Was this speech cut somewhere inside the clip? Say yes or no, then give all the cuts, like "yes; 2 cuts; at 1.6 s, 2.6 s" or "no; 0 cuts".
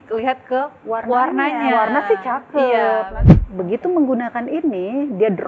yes; 1 cut; at 3.1 s